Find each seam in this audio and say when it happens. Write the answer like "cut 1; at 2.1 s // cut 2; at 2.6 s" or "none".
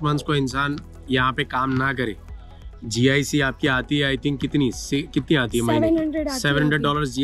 none